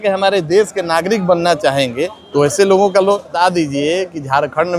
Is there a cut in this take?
yes; 1 cut; at 3.3 s

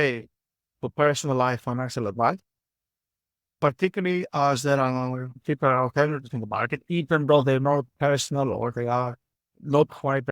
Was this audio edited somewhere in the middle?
yes; 1 cut; at 5.3 s

